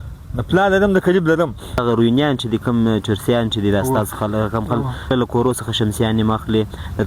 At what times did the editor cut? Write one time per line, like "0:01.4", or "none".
0:01.8
0:05.1